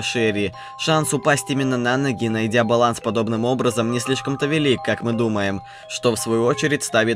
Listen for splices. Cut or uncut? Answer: cut